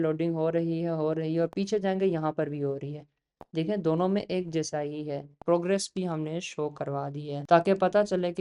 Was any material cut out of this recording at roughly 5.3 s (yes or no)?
yes